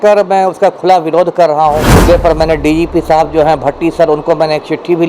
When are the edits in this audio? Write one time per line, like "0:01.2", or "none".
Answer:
0:01.8